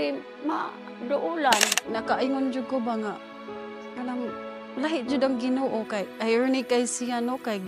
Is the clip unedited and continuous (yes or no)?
no